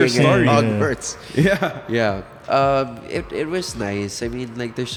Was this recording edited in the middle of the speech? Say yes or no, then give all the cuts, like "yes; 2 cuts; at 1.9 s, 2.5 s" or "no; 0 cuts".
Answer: no; 0 cuts